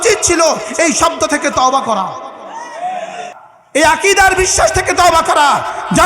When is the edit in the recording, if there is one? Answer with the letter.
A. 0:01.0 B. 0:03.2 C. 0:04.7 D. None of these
B